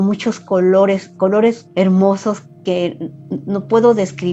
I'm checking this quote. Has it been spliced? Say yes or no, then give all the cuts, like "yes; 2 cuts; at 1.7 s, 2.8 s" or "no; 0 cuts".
yes; 1 cut; at 1.6 s